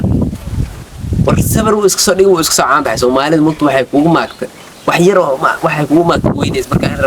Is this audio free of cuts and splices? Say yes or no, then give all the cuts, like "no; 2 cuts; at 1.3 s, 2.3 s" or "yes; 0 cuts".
yes; 0 cuts